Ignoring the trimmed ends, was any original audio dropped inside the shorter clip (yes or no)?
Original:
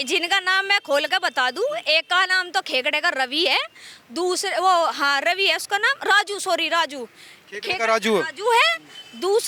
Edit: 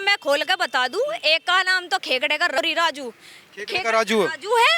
yes